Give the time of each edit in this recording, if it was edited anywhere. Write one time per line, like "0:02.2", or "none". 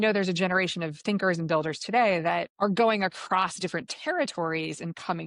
0:02.5